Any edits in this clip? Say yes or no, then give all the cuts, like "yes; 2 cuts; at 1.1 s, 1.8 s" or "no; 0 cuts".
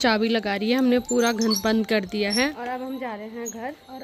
no; 0 cuts